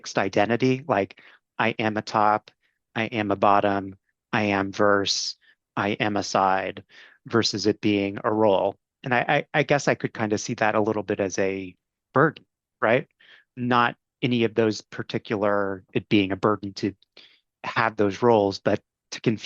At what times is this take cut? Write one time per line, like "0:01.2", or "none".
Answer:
0:07.1
0:09.4
0:13.4
0:15.8